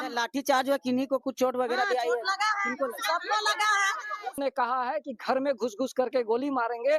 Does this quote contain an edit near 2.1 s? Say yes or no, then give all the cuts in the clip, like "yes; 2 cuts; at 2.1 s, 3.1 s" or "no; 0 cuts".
no; 1 cut; at 4.4 s